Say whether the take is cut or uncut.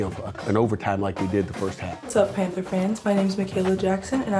cut